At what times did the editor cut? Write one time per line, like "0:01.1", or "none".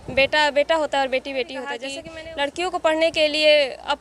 0:02.0